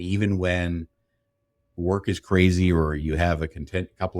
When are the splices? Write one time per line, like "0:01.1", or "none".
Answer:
none